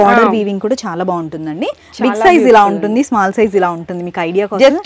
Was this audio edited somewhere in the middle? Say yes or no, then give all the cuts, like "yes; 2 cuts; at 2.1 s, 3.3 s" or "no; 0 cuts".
no; 0 cuts